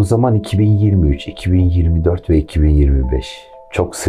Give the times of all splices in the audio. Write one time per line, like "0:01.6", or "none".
none